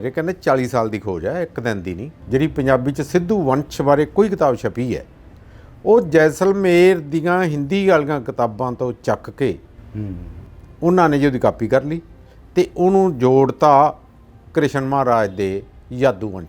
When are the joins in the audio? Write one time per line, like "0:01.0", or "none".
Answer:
0:02.1